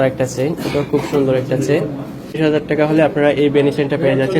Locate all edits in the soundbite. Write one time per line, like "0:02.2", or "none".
0:02.4